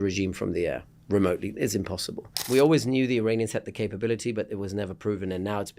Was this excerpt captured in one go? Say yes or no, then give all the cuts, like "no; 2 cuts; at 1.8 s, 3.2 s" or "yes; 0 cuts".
no; 1 cut; at 2.3 s